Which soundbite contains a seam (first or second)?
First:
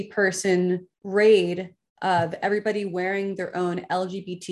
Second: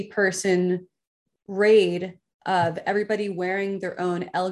first